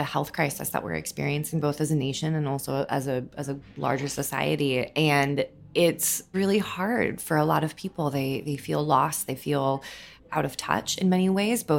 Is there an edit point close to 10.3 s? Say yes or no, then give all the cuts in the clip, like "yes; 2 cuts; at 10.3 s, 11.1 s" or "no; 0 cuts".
yes; 2 cuts; at 6.3 s, 10.3 s